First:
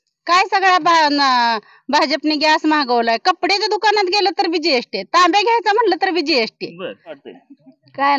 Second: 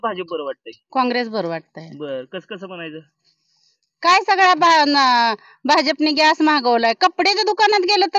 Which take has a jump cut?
first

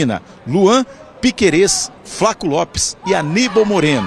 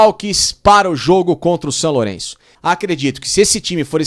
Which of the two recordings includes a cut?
second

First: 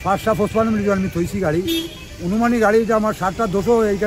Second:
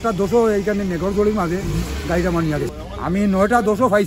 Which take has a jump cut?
second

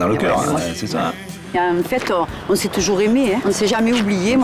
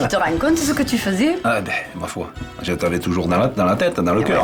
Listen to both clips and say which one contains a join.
first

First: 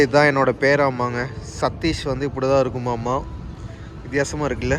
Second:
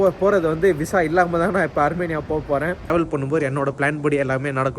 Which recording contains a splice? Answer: second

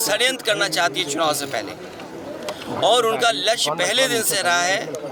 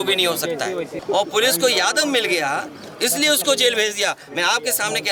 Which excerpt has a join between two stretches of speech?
second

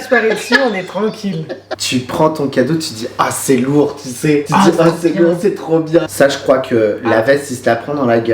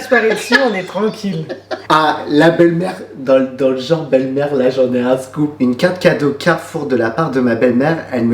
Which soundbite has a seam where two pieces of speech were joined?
first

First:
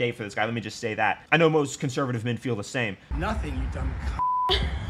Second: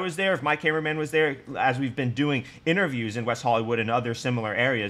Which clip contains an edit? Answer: first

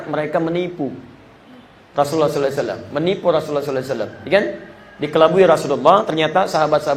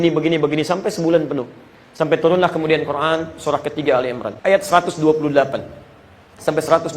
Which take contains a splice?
second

